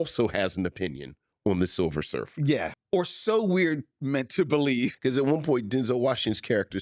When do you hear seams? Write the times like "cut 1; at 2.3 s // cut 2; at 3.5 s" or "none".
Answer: cut 1; at 2.8 s // cut 2; at 5.0 s